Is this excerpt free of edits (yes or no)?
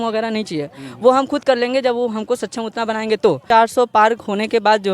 no